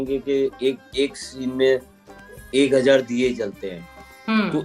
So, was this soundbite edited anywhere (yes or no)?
no